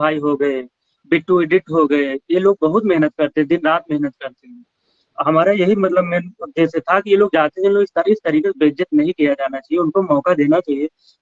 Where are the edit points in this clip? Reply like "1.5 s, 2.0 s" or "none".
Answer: none